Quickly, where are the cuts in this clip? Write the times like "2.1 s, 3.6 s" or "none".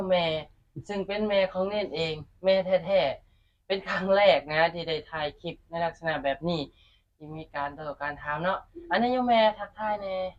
none